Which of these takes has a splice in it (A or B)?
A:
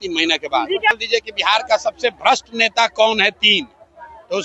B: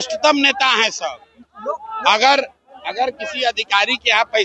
A